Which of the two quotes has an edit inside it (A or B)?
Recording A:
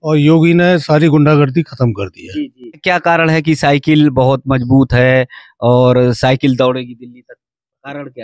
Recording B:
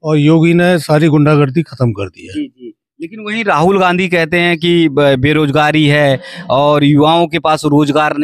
A